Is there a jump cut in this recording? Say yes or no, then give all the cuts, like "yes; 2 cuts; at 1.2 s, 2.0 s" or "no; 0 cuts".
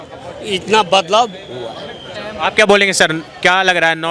no; 0 cuts